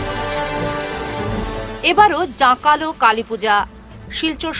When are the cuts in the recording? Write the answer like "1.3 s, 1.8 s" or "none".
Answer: 1.1 s